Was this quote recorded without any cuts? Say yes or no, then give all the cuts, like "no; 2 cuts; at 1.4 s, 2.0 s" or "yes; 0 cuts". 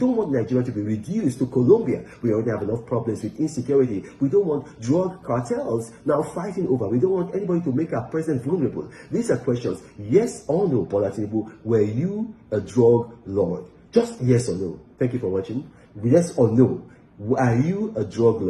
yes; 0 cuts